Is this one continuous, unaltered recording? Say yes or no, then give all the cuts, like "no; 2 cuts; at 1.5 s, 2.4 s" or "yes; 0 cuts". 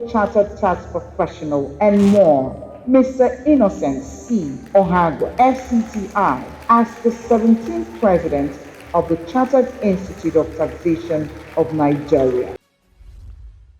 no; 1 cut; at 12.6 s